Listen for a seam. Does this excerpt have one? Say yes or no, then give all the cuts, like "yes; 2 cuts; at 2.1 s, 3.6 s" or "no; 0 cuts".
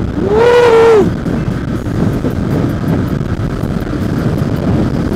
no; 0 cuts